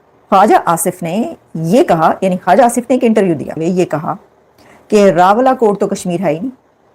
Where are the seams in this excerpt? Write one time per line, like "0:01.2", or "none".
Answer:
0:03.6